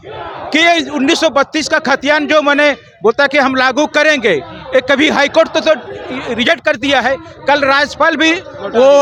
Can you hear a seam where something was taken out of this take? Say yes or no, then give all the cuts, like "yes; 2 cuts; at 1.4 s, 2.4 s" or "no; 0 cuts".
no; 0 cuts